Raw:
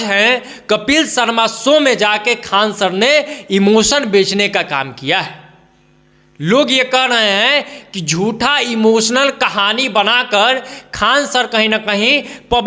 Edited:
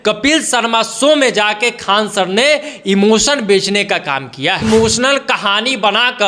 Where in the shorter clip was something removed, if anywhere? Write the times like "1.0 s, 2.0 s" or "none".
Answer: 4.6 s